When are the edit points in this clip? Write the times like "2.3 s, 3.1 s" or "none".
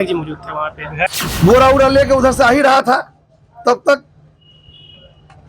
1.1 s